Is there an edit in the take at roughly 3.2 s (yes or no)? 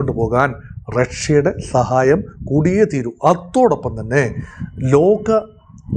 no